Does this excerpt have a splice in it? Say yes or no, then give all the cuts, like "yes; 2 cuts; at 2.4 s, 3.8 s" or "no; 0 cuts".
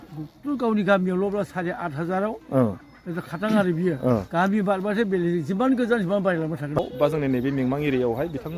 yes; 1 cut; at 6.8 s